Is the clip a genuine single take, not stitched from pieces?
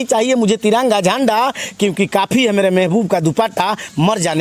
yes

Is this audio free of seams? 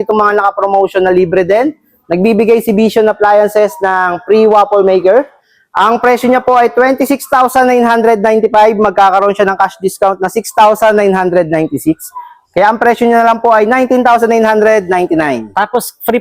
yes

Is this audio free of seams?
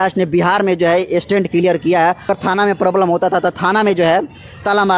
no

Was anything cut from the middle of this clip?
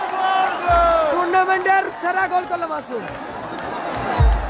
no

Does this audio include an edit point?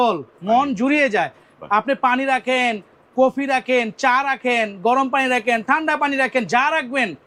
no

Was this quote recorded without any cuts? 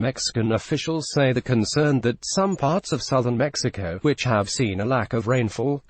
no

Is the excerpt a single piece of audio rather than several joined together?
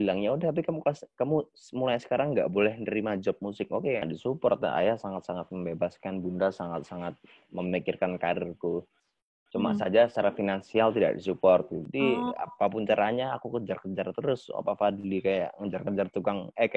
no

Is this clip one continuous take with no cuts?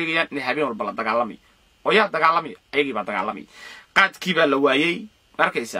yes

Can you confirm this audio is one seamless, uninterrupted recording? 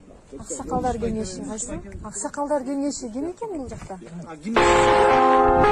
no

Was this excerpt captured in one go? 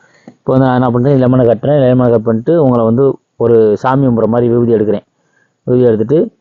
yes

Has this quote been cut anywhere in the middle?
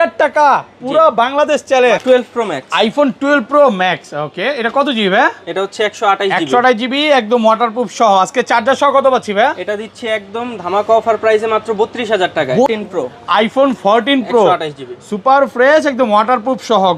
yes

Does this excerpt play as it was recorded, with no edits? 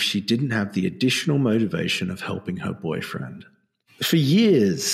no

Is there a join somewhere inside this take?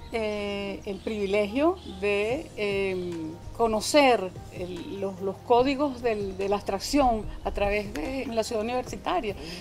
yes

